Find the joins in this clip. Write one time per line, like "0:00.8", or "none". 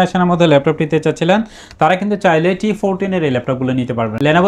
none